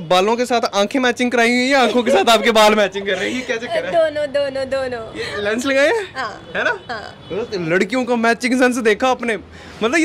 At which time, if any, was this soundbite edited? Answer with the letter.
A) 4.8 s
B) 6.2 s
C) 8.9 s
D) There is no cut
D